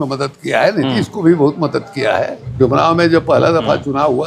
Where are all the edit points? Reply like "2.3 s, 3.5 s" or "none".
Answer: 2.4 s